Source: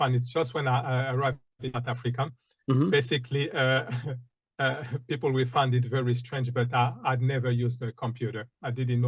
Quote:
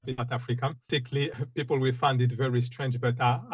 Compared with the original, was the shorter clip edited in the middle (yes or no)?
yes